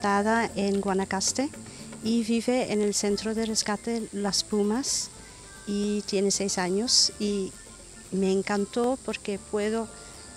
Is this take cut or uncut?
uncut